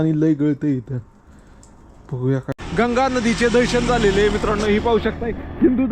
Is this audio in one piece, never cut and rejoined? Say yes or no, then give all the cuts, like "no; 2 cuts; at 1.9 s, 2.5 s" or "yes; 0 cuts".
no; 1 cut; at 2.6 s